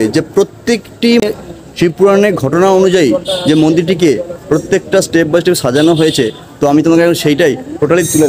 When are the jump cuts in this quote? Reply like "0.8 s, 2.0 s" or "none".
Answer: 1.2 s